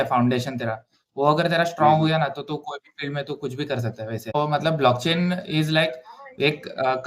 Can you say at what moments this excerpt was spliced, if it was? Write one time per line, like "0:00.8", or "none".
0:04.3